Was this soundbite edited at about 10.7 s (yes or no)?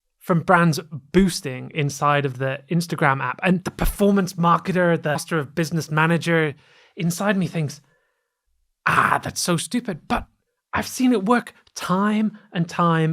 no